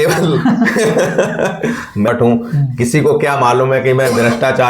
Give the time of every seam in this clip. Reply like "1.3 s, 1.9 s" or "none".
2.1 s